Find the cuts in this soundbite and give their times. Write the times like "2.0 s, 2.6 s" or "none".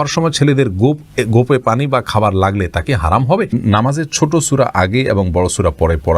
3.5 s